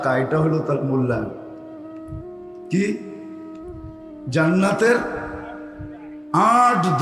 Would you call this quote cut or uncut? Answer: uncut